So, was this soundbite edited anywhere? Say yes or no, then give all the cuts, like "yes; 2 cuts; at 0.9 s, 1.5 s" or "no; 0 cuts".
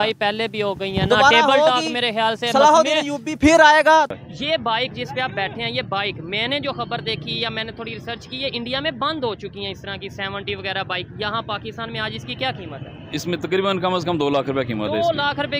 yes; 1 cut; at 4.1 s